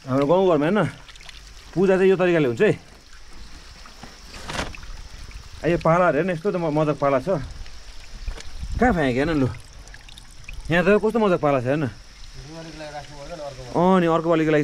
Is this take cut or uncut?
uncut